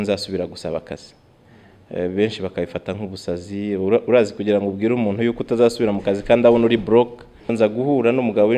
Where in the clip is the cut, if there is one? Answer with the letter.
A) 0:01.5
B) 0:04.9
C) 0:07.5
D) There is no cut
C